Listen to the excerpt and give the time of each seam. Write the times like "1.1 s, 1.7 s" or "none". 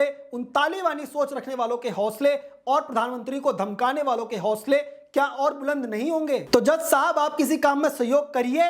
6.4 s

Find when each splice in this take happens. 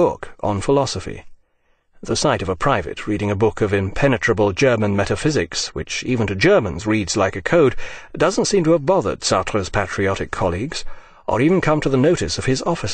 11.5 s

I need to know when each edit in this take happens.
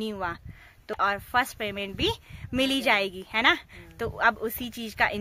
0.9 s

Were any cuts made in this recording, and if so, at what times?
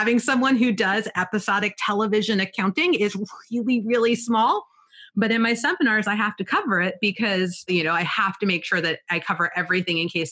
7.7 s

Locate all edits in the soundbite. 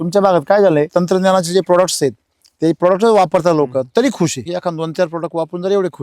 0.9 s, 4.5 s

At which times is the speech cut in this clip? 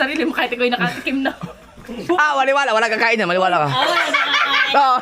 1.9 s

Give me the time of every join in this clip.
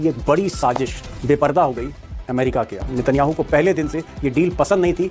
2.8 s

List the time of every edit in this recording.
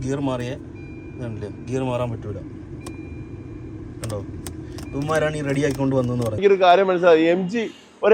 6.4 s

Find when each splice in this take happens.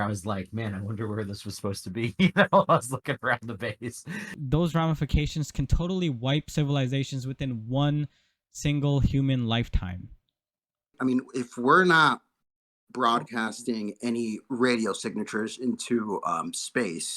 4.3 s, 11.0 s

